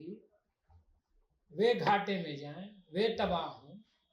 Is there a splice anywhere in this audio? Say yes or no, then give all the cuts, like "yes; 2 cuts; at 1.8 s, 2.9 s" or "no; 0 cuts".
no; 0 cuts